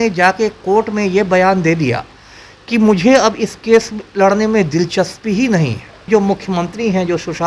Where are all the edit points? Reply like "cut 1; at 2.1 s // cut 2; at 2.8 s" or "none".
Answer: cut 1; at 5.9 s